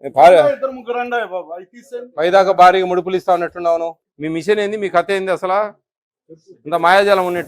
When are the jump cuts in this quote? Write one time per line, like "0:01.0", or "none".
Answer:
0:04.0